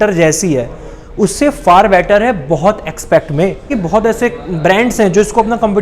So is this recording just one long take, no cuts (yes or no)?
no